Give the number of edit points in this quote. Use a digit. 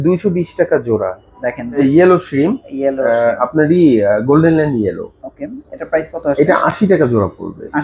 1